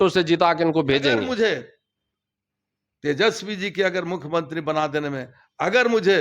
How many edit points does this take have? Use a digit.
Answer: 1